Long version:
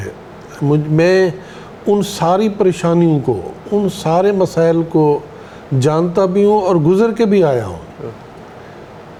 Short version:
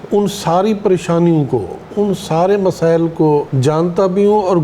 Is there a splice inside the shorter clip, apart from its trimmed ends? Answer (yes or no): yes